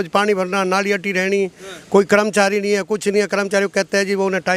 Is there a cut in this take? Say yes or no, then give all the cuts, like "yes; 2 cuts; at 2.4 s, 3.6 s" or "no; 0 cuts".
no; 0 cuts